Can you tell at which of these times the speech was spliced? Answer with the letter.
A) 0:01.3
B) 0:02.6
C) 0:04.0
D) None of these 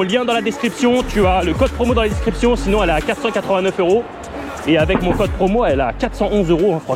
D